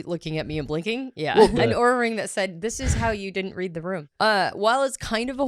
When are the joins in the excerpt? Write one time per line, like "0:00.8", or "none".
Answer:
0:01.6
0:04.1